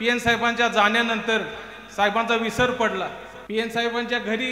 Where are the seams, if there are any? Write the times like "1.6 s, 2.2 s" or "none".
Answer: 3.3 s